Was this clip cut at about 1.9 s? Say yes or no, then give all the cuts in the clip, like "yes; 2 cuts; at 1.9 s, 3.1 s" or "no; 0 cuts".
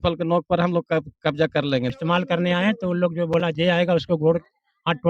yes; 1 cut; at 1.9 s